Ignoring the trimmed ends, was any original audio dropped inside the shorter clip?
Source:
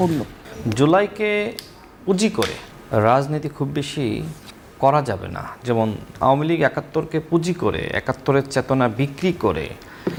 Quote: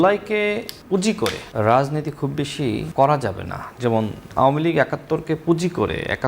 yes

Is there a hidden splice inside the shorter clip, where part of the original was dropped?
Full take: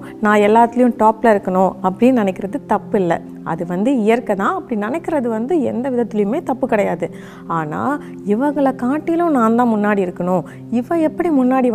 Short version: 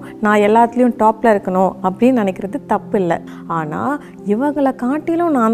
yes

